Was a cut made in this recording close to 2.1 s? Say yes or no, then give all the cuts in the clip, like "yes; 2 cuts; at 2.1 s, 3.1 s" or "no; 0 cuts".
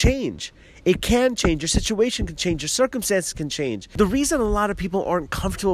no; 1 cut; at 3.8 s